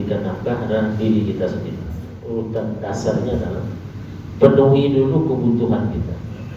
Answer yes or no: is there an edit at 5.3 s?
no